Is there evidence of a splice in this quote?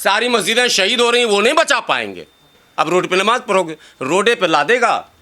yes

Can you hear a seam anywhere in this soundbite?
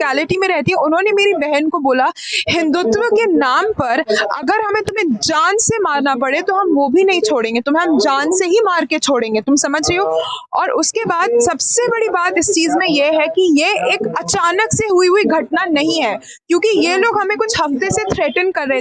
no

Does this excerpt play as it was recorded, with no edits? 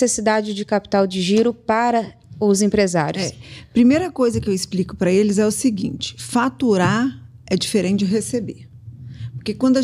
yes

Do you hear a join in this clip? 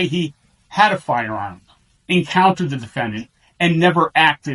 no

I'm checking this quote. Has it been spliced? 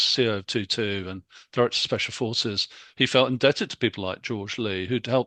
no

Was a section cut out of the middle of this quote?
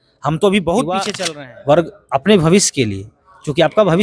yes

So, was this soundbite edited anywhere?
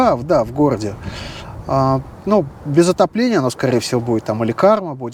no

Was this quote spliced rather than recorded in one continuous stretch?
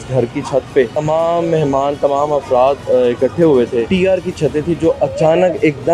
yes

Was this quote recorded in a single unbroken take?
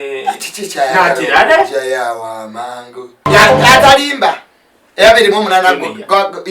no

